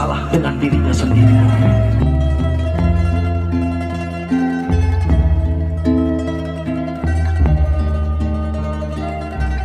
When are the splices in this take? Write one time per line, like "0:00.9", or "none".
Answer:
none